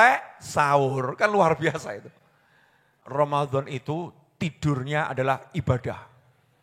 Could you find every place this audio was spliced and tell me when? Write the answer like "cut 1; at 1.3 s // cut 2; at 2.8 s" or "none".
cut 1; at 3.0 s